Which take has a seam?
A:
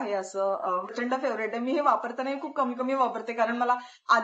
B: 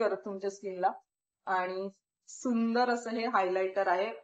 A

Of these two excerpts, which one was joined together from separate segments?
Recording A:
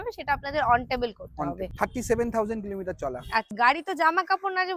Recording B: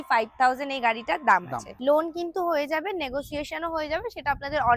A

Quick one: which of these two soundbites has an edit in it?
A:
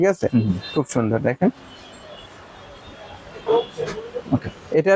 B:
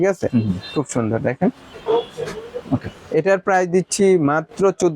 B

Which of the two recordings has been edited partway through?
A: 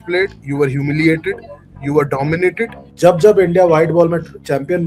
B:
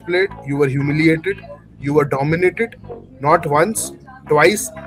A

